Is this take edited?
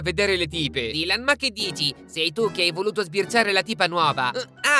no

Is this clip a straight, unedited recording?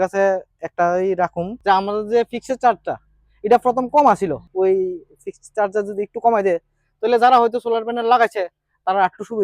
no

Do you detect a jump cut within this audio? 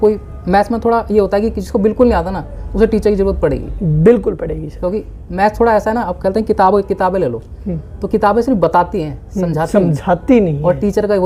no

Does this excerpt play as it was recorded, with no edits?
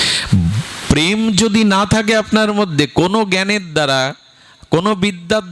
yes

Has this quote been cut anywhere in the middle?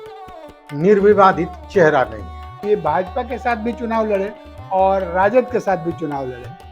yes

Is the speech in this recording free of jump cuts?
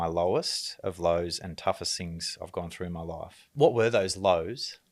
no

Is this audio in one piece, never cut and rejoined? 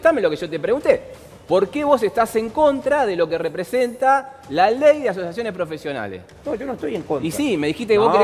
yes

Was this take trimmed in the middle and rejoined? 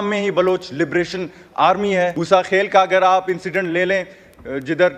yes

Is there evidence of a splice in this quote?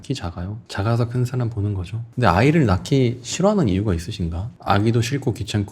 yes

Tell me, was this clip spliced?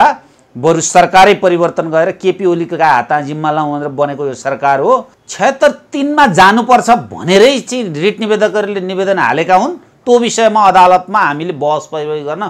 yes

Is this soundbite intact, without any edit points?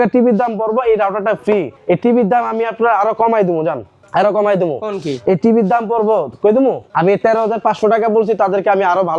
no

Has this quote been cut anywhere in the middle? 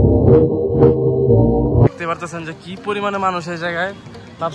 yes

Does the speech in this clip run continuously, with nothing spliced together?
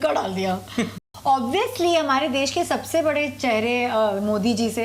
no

